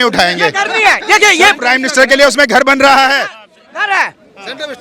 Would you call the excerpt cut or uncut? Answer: uncut